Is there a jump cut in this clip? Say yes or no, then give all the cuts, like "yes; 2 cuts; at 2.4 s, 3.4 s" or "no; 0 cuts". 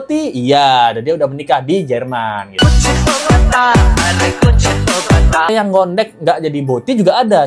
yes; 1 cut; at 5.5 s